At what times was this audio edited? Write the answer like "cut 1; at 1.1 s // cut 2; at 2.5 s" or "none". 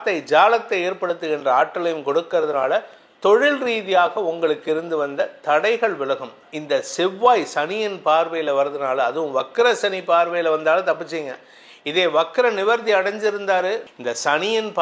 cut 1; at 6.4 s // cut 2; at 13.9 s